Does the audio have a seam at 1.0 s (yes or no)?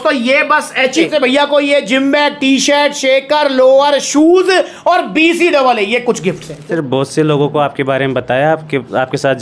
yes